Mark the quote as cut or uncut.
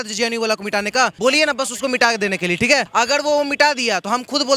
cut